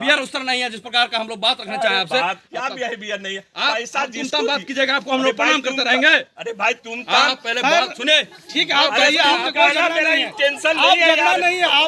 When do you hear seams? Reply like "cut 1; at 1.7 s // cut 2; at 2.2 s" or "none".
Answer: none